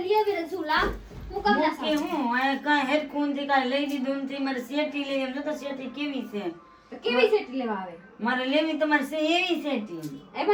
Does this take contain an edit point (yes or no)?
no